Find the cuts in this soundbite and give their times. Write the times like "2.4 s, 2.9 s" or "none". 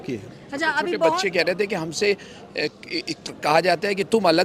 0.9 s